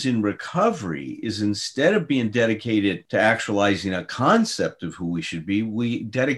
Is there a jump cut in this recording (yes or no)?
yes